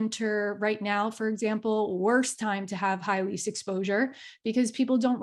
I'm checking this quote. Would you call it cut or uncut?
uncut